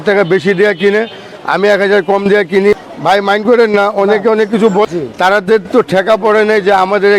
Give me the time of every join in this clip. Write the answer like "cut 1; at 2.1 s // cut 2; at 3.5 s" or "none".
cut 1; at 2.8 s // cut 2; at 4.9 s